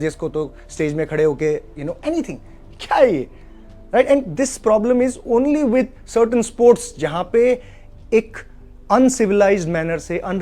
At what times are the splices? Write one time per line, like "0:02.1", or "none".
none